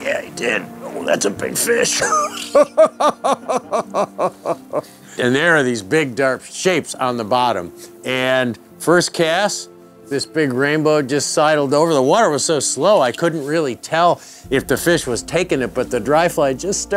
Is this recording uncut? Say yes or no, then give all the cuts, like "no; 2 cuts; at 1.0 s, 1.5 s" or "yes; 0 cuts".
no; 2 cuts; at 5.2 s, 6.5 s